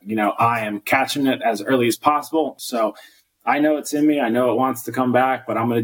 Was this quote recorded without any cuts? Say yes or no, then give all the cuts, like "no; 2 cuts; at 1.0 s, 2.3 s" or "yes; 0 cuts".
no; 1 cut; at 2.6 s